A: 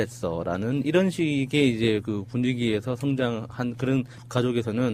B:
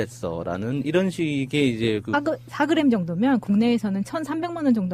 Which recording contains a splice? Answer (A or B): A